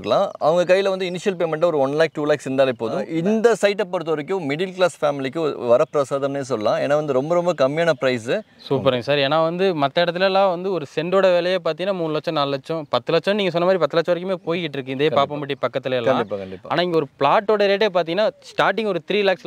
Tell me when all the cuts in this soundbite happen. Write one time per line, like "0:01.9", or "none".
0:03.1
0:08.5